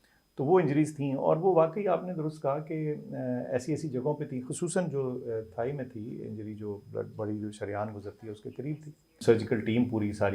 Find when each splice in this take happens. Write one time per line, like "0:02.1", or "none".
0:09.2